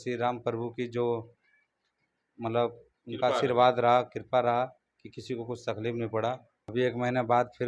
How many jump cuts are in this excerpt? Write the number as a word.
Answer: one